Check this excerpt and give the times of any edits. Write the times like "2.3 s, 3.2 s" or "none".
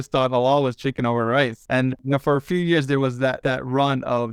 1.9 s, 3.4 s